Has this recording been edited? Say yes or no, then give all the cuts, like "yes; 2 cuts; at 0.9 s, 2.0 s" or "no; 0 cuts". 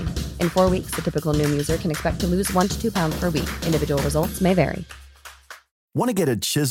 no; 0 cuts